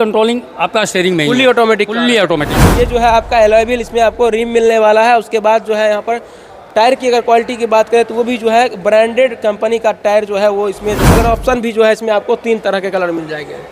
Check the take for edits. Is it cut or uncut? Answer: cut